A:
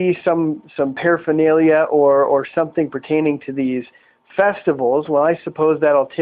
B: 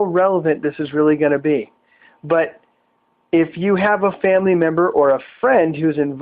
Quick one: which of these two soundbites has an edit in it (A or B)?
A